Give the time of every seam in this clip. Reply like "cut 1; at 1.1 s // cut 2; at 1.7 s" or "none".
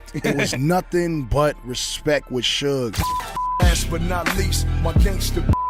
cut 1; at 3.0 s

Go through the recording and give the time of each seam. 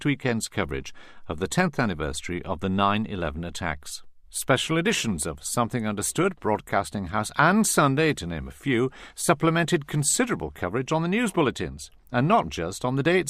cut 1; at 5.3 s

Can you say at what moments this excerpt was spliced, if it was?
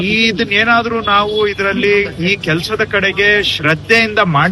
none

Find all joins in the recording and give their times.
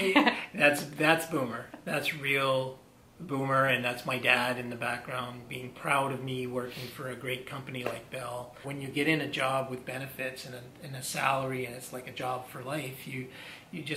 cut 1; at 8.6 s

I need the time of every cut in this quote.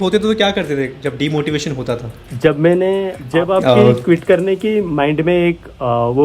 cut 1; at 3.2 s

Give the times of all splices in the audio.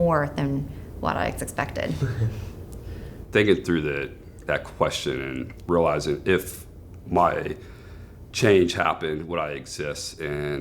cut 1; at 3.1 s

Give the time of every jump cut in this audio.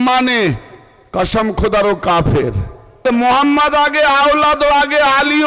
cut 1; at 3.0 s

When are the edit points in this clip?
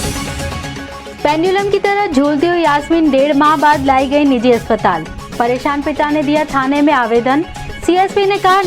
cut 1; at 1.1 s

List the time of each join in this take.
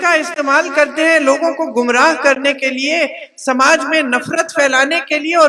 none

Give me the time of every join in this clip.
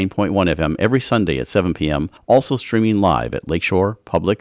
cut 1; at 2.1 s

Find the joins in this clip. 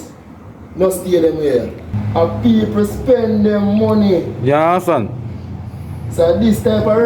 cut 1; at 1.8 s

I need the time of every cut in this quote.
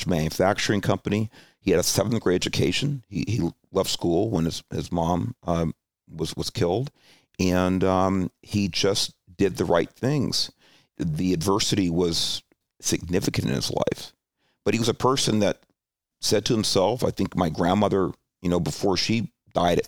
cut 1; at 10.9 s // cut 2; at 12.6 s // cut 3; at 16.1 s

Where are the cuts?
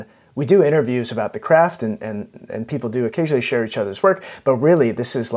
cut 1; at 3.1 s

